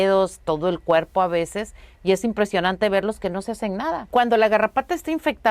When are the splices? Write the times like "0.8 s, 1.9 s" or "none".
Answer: 4.1 s